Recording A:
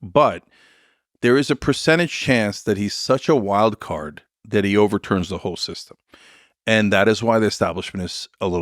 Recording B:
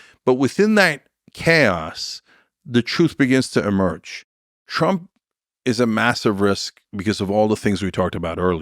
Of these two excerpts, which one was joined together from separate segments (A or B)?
B